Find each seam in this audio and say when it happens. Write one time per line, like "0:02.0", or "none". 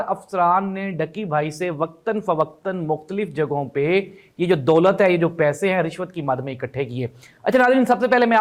none